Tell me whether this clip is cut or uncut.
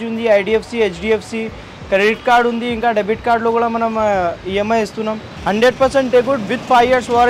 cut